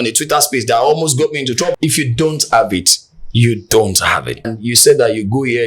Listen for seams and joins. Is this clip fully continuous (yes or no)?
no